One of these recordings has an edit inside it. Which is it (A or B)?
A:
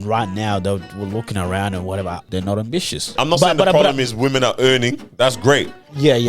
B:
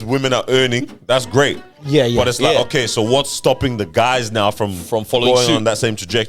A